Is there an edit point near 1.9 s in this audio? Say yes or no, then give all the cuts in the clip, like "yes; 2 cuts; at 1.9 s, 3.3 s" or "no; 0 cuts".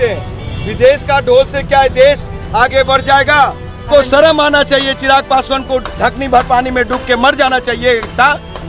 no; 1 cut; at 3.9 s